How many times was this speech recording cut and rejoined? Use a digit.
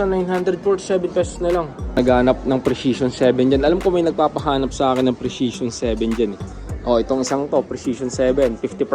1